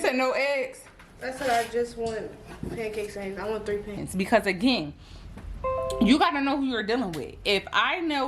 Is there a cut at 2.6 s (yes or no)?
no